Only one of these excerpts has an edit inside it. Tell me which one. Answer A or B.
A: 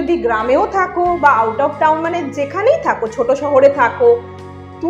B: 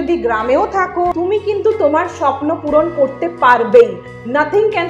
B